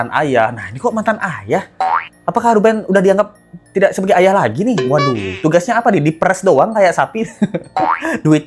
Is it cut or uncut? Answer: uncut